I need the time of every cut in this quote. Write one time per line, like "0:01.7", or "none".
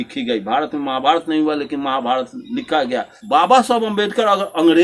0:03.2